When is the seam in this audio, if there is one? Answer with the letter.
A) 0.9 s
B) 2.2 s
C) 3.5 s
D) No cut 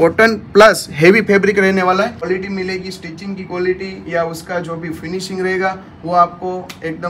B